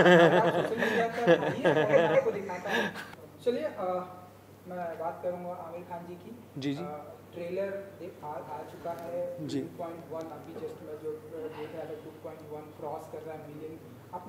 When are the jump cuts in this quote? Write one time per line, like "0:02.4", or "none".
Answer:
0:03.0

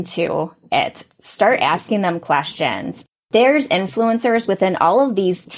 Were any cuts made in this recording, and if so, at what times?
none

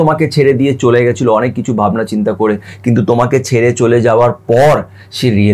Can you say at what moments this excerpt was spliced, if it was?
none

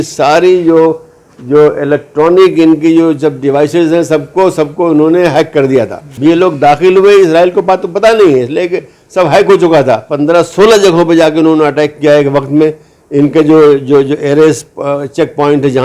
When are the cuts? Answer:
0:06.1
0:10.1

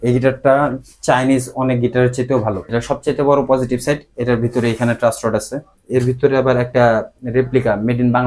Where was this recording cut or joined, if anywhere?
0:02.6
0:05.7

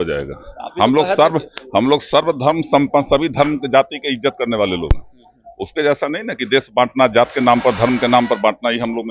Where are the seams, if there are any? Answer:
none

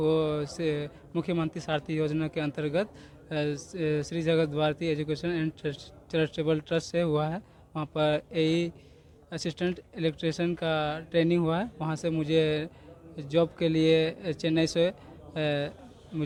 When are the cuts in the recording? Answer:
none

